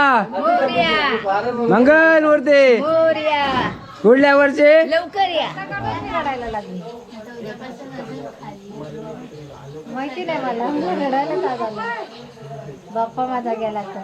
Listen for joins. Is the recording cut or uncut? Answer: cut